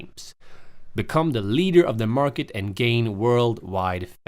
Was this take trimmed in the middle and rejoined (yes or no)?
yes